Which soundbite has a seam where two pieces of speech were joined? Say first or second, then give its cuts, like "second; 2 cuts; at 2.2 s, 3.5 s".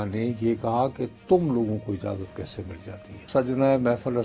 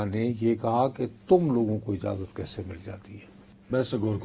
first; 1 cut; at 3.3 s